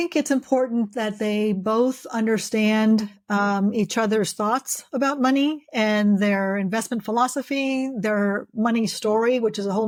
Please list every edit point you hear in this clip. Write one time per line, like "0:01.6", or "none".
none